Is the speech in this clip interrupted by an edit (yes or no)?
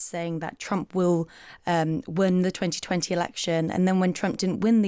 no